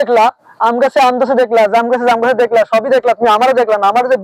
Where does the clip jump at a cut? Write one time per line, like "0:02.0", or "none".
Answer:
none